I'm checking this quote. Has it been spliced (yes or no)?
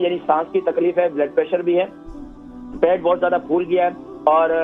no